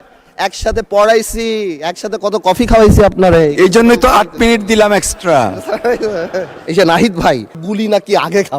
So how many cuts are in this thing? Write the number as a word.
two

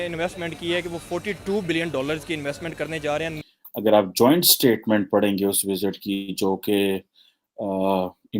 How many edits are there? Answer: one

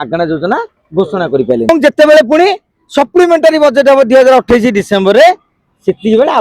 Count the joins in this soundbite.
one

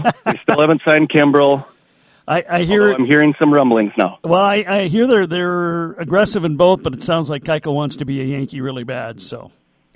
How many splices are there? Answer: zero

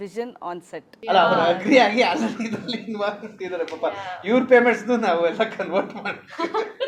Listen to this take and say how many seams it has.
one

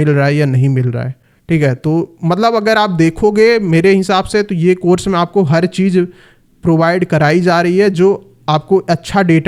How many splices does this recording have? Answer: zero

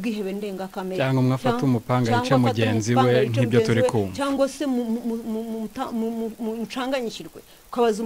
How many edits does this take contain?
zero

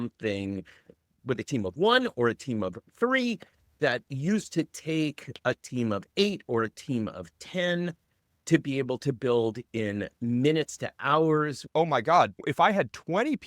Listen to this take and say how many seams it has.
one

